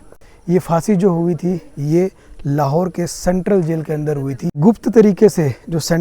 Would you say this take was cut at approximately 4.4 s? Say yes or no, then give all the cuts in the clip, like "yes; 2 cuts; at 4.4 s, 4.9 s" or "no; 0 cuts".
yes; 1 cut; at 4.4 s